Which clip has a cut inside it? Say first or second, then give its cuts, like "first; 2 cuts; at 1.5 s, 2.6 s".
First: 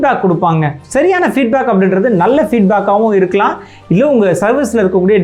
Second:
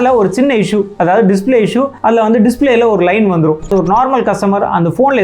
second; 2 cuts; at 1.9 s, 3.7 s